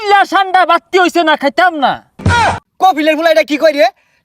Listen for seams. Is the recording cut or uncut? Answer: cut